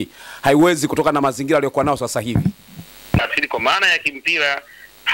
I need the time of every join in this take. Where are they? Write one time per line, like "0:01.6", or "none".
0:03.2